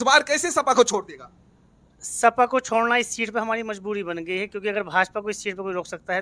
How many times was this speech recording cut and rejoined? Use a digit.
0